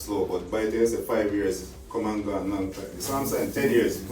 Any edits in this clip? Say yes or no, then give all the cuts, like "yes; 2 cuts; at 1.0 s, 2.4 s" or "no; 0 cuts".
no; 0 cuts